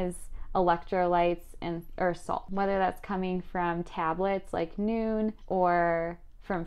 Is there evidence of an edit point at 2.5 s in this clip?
yes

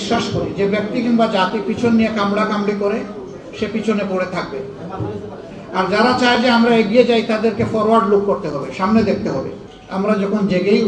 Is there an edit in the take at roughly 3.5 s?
no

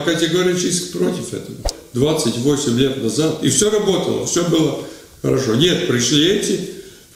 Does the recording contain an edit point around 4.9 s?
no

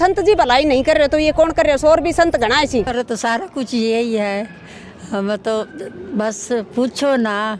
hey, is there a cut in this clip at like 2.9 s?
yes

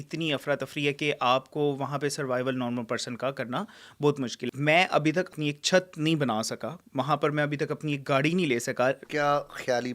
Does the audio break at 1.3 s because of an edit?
no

